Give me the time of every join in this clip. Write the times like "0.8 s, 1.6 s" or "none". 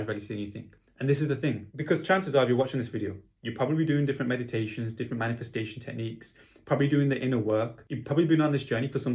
1.7 s